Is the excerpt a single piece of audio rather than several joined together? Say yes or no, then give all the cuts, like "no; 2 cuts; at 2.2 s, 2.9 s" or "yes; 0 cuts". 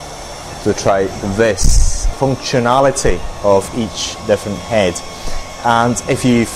no; 1 cut; at 2.1 s